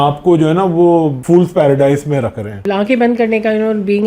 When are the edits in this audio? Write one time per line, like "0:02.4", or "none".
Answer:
0:01.2
0:02.7